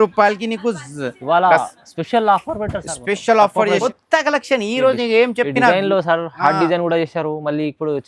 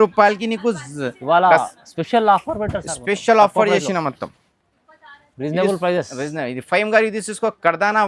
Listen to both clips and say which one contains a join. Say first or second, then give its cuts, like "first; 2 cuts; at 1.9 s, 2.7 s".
first; 1 cut; at 3.8 s